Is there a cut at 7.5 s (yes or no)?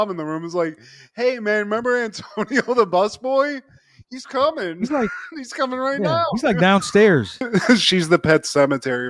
yes